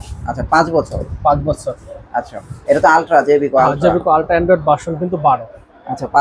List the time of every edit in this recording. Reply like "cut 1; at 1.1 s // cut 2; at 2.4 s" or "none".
none